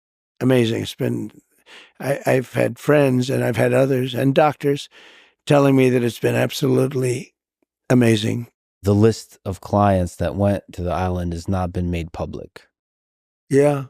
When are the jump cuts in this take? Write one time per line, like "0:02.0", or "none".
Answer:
0:08.6